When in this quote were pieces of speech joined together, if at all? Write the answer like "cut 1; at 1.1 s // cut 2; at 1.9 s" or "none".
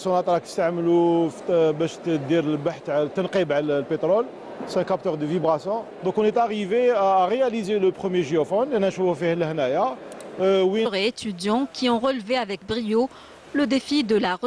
none